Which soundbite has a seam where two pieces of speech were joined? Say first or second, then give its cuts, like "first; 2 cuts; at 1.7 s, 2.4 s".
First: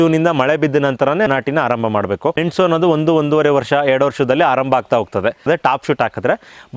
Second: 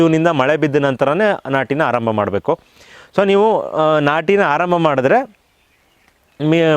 first; 3 cuts; at 1.3 s, 2.4 s, 5.4 s